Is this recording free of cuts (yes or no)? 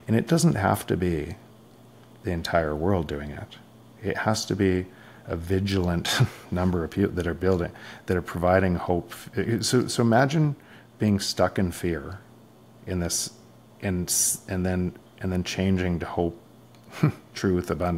yes